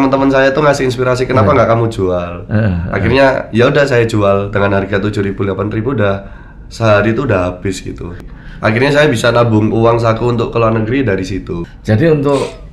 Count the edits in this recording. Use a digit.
2